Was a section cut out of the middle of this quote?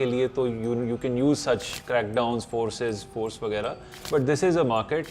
yes; 1 cut; at 3.9 s

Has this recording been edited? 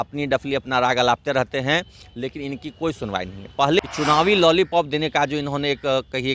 yes; 1 cut; at 3.8 s

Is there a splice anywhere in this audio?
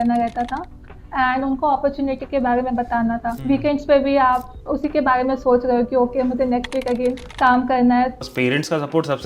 yes; 4 cuts; at 3.3 s, 4.5 s, 7.3 s, 8.2 s

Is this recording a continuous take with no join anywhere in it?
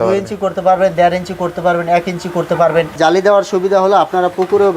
no; 1 cut; at 2.9 s

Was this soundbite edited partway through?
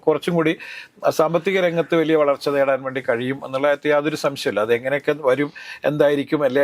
no; 0 cuts

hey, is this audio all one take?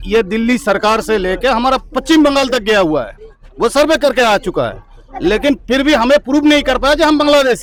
yes; 0 cuts

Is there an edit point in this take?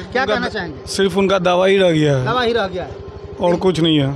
no; 0 cuts

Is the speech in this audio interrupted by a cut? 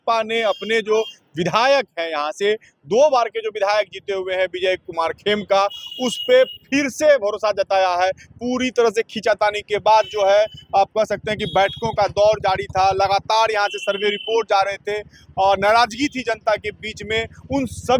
no; 0 cuts

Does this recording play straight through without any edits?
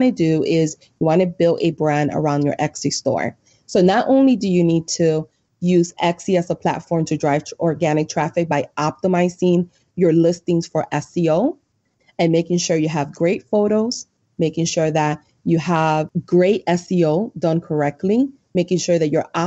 no; 1 cut; at 16.1 s

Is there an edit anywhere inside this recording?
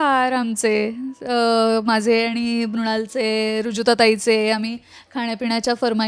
no; 0 cuts

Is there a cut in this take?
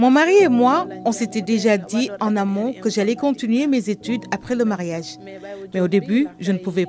no; 0 cuts

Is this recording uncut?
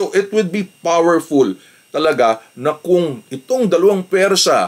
yes; 0 cuts

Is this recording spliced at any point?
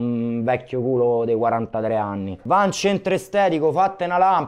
yes; 1 cut; at 2.3 s

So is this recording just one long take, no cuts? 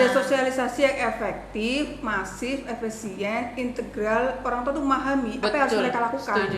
yes; 0 cuts

